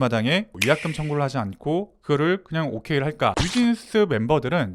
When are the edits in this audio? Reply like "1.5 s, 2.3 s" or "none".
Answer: 3.4 s